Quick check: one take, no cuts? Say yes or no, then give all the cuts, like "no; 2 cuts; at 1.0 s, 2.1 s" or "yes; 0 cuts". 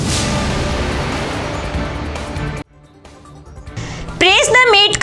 yes; 0 cuts